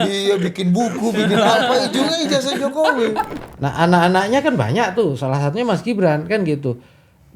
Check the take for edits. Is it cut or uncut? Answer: cut